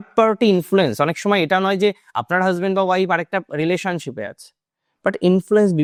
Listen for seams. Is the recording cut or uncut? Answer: uncut